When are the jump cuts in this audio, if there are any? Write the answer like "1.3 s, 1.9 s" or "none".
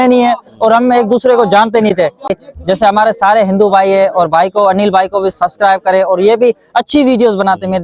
2.4 s